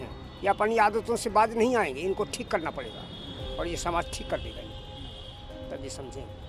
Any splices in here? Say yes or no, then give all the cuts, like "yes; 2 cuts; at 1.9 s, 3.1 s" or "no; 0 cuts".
no; 0 cuts